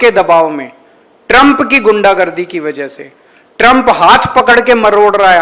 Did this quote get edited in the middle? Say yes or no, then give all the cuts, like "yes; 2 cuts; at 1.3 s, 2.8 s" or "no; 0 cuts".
no; 0 cuts